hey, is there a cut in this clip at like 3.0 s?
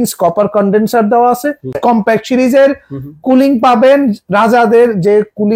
no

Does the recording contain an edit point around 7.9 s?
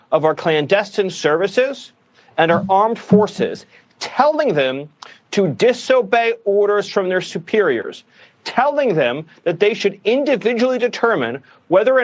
no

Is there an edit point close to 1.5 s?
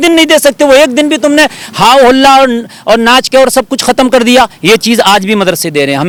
no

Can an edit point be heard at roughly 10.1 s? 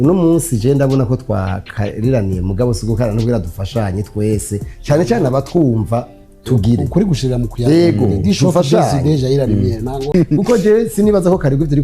yes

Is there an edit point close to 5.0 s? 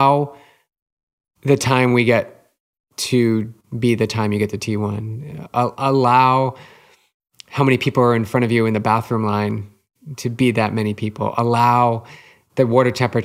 no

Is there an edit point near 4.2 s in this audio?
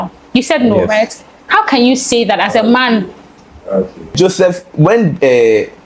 yes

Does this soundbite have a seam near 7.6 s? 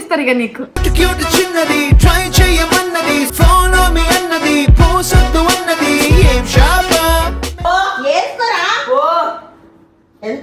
yes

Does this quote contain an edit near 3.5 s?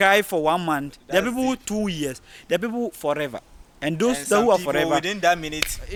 no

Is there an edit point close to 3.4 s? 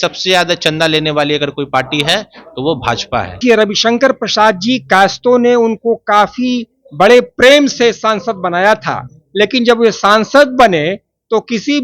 yes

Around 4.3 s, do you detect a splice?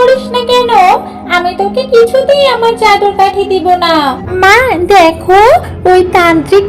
yes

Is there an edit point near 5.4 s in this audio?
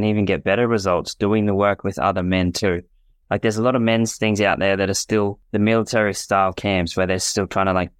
yes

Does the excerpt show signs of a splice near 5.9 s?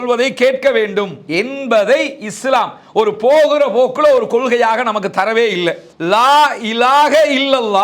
yes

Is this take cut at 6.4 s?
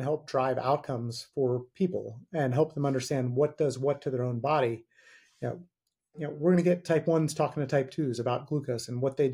no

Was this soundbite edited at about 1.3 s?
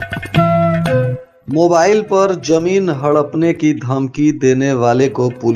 yes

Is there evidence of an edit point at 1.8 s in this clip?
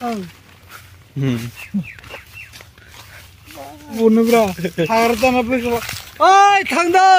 no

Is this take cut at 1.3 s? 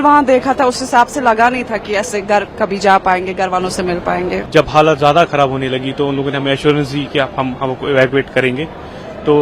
no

